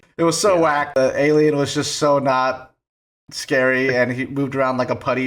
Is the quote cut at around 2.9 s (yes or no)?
no